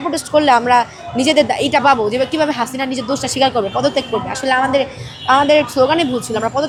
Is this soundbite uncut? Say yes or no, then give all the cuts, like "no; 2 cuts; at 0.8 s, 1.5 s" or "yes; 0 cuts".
yes; 0 cuts